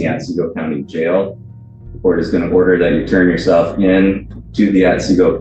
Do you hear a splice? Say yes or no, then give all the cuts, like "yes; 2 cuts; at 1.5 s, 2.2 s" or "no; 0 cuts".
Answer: no; 0 cuts